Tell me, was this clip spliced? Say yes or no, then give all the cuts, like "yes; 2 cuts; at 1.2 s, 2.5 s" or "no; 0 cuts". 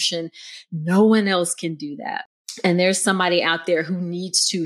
yes; 1 cut; at 2.7 s